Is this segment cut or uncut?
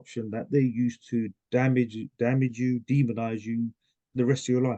uncut